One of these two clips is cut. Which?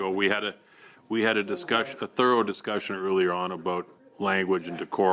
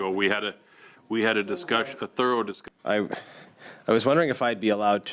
second; 1 cut; at 2.6 s

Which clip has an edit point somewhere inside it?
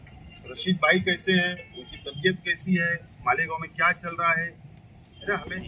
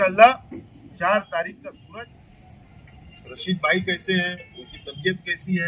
second; 1 cut; at 1.8 s

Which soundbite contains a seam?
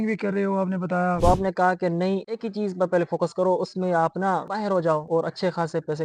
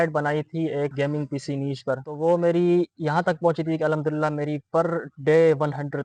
first; 1 cut; at 1.2 s

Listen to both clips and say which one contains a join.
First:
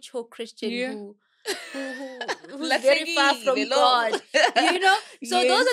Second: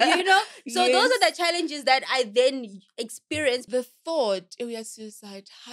second; 1 cut; at 3.7 s

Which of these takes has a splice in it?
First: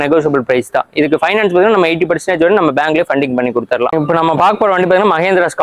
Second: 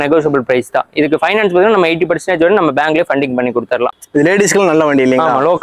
second; 1 cut; at 3.9 s

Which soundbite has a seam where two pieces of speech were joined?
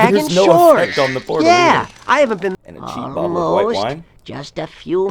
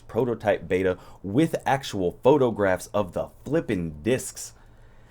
first; 1 cut; at 2.5 s

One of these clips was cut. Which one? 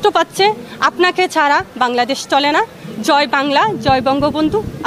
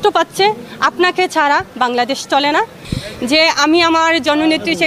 second; 1 cut; at 2.9 s

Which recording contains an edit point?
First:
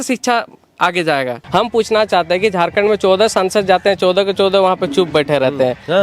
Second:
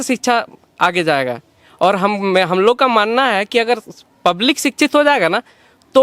first; 1 cut; at 1.4 s

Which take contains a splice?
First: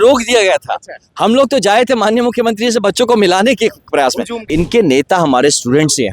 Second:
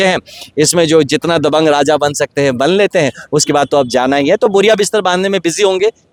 first; 1 cut; at 4.5 s

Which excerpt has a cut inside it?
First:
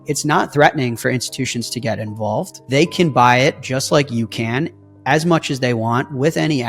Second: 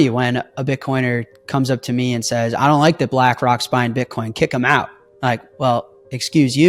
first; 1 cut; at 2.6 s

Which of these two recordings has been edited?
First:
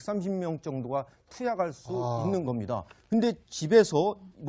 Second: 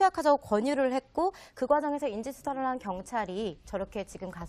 second; 1 cut; at 1.5 s

